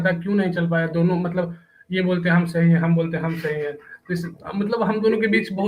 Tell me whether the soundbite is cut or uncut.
uncut